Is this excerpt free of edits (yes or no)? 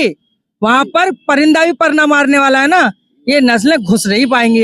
yes